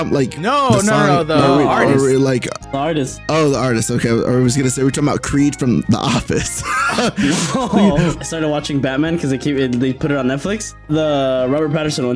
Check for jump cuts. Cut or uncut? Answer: cut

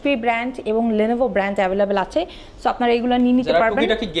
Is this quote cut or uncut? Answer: uncut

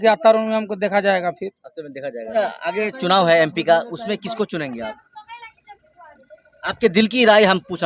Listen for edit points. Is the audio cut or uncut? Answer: cut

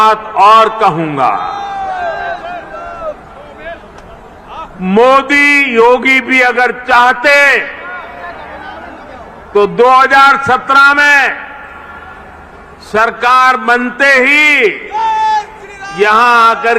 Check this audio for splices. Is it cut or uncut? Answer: uncut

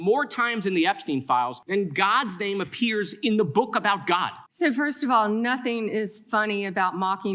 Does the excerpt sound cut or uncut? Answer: cut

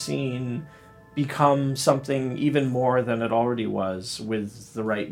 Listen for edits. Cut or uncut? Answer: uncut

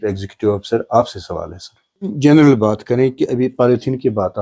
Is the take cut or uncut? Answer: cut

